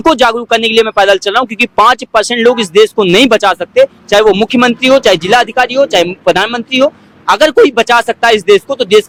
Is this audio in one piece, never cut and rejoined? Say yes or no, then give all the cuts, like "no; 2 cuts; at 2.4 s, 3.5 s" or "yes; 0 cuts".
yes; 0 cuts